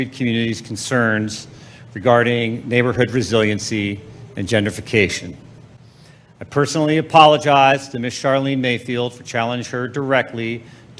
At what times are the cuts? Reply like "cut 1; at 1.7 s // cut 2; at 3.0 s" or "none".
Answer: none